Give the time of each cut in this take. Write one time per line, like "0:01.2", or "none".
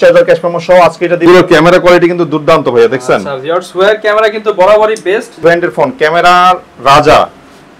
0:01.3
0:05.4